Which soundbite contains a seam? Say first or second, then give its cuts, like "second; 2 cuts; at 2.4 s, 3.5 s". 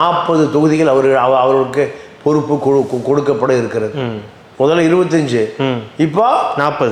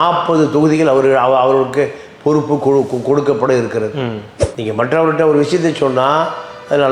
second; 1 cut; at 4.4 s